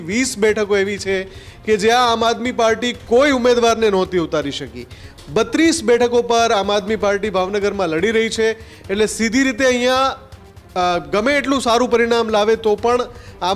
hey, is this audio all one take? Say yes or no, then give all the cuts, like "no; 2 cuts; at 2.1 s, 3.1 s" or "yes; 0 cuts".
yes; 0 cuts